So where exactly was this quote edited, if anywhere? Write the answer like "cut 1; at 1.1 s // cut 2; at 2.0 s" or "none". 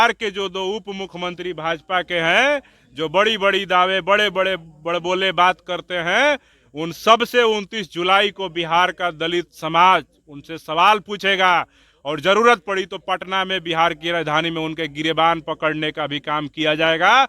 none